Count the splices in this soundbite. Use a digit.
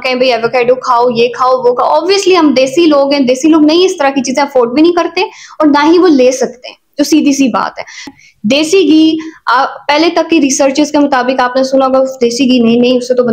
1